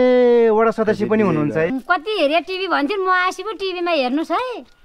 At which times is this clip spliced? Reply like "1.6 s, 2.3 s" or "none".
1.7 s